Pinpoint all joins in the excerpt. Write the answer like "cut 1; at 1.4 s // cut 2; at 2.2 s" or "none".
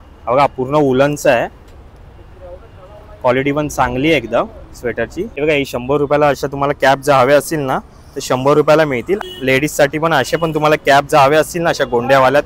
cut 1; at 5.2 s // cut 2; at 9.2 s